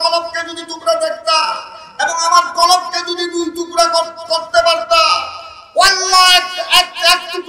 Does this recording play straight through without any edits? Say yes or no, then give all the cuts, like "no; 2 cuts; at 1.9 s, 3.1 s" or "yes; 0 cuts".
yes; 0 cuts